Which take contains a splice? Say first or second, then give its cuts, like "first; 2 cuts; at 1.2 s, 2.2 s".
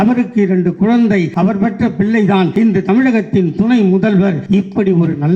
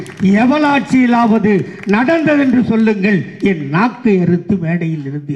first; 3 cuts; at 1.3 s, 2.5 s, 4.4 s